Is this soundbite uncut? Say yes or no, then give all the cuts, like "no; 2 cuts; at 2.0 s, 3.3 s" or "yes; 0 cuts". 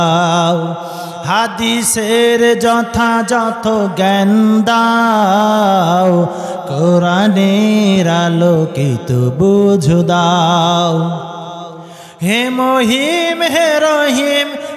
yes; 0 cuts